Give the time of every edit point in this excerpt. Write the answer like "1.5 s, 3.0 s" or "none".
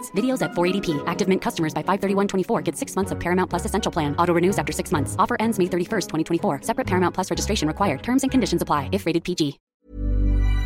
9.7 s